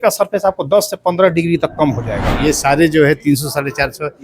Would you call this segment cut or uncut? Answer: cut